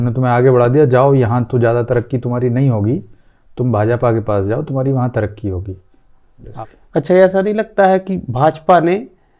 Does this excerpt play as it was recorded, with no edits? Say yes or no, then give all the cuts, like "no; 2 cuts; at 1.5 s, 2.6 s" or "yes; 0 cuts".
no; 1 cut; at 6.4 s